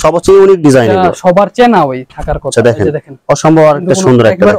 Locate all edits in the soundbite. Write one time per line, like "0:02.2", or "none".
none